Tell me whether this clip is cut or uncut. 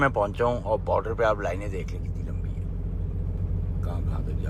uncut